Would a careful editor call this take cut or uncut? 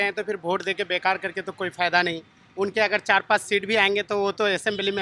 uncut